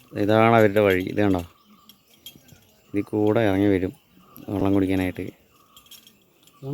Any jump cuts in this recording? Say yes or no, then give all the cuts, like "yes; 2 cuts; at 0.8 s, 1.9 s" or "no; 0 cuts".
no; 0 cuts